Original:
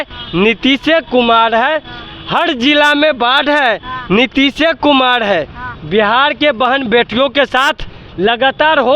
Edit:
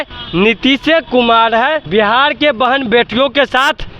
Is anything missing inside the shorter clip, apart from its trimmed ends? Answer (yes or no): yes